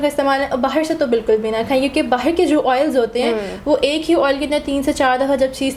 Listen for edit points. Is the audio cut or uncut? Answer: uncut